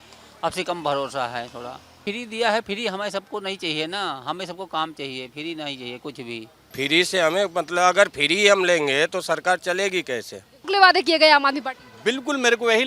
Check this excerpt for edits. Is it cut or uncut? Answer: cut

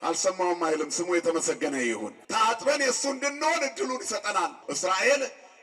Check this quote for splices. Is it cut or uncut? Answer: cut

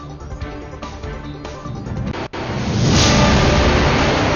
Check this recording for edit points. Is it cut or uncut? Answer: uncut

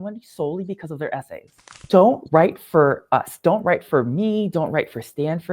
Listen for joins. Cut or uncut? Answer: cut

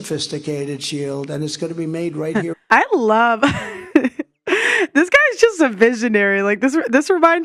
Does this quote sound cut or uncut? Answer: uncut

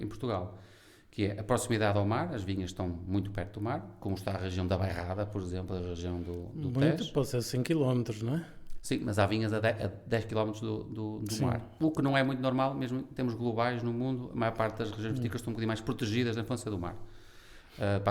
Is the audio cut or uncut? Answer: uncut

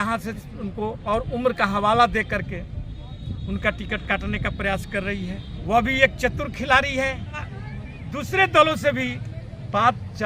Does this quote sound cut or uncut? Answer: cut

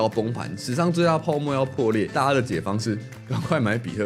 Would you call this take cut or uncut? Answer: cut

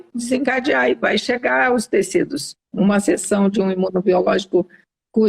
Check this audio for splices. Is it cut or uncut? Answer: cut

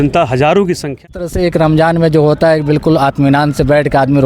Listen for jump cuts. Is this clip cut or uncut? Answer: cut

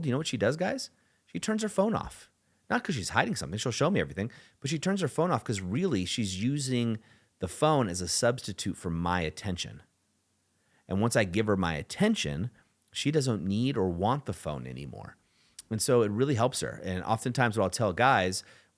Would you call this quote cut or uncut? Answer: uncut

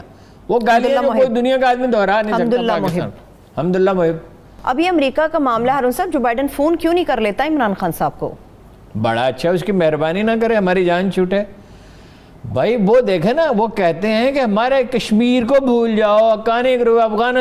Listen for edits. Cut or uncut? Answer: uncut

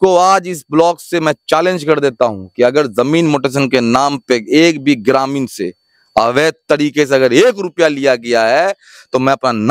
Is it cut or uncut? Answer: uncut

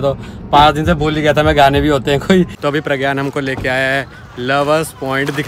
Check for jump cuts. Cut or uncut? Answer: cut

